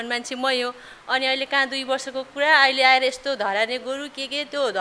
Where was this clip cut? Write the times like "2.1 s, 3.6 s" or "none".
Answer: none